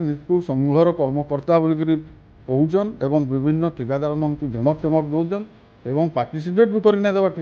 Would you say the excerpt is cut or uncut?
uncut